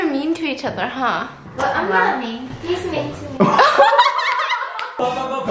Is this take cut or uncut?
uncut